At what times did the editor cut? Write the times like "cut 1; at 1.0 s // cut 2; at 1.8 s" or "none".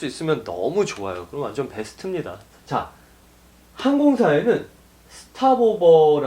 cut 1; at 2.5 s

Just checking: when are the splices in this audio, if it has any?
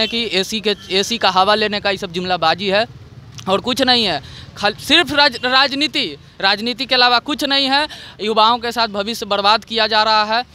none

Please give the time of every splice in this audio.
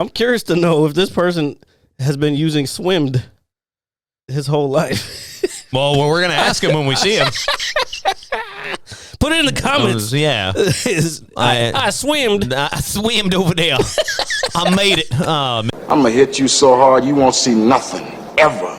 cut 1; at 15.7 s

